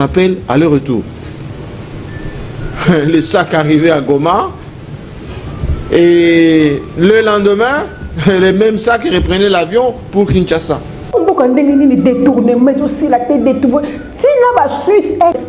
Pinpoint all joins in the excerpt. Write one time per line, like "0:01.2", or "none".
0:11.1